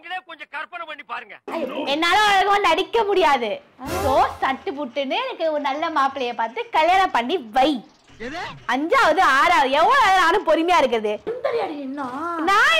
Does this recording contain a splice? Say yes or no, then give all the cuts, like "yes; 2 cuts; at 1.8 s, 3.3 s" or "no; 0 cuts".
yes; 2 cuts; at 1.4 s, 11.3 s